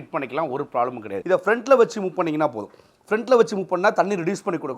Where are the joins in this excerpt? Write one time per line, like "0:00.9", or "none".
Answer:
0:01.1